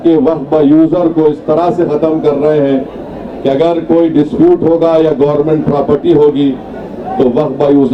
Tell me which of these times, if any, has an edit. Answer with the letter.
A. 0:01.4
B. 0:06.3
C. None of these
C